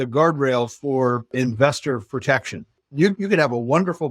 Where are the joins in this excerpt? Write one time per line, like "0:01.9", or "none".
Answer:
0:01.3
0:02.7